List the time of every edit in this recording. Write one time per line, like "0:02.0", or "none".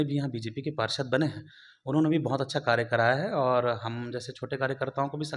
none